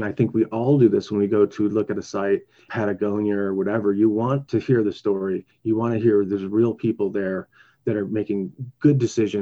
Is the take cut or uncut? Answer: cut